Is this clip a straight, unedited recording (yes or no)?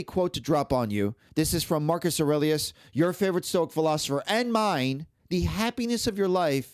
no